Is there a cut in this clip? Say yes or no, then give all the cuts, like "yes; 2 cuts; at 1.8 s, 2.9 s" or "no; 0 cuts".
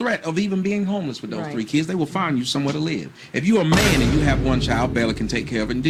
no; 0 cuts